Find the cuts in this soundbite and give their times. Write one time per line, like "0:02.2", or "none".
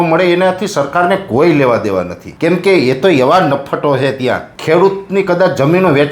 0:02.2
0:04.5